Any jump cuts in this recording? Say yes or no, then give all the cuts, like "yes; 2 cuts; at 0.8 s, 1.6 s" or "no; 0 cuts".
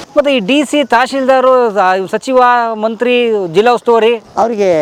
no; 0 cuts